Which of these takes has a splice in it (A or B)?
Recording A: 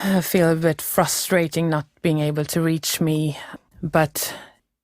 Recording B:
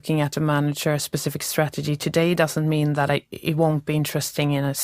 A